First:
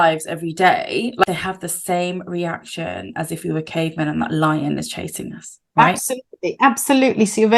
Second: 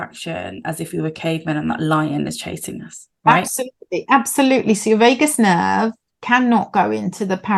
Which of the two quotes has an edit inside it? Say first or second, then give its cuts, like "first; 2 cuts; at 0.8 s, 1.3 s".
first; 1 cut; at 1.2 s